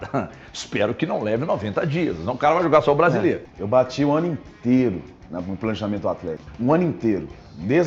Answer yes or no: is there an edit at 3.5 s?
yes